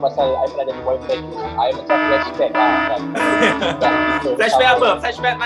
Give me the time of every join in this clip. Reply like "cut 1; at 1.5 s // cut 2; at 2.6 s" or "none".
none